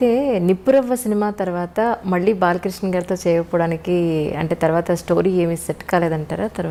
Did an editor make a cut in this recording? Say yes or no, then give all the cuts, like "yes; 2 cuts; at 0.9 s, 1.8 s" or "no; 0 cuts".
no; 0 cuts